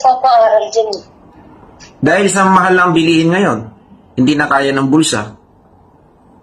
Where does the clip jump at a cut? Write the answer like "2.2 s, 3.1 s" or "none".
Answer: none